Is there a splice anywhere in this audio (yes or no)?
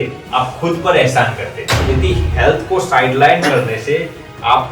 yes